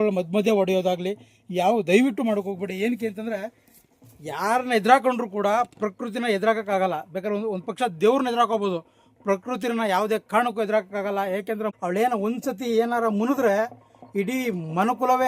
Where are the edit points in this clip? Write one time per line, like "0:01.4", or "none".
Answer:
0:11.7